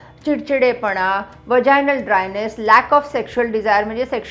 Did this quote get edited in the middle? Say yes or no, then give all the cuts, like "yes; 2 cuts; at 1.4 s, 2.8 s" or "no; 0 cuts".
no; 0 cuts